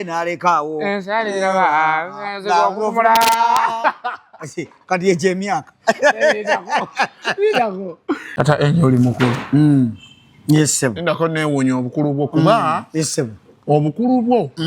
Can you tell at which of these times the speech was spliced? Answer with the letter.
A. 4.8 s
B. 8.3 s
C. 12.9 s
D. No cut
B